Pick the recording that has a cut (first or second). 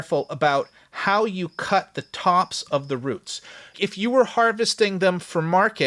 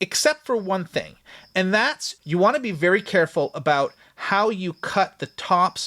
first